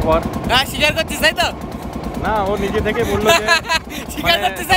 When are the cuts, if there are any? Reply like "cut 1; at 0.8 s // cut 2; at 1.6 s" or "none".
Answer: none